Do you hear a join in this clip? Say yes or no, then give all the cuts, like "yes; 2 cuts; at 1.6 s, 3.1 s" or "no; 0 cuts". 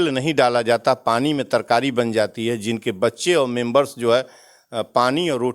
no; 0 cuts